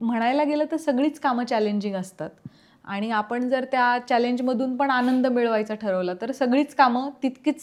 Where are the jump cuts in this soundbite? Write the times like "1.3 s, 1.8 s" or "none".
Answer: none